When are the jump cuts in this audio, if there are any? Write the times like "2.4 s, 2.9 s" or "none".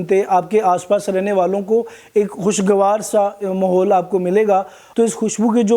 4.8 s